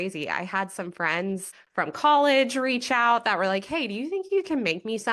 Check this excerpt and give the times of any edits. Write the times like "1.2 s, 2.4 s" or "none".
1.6 s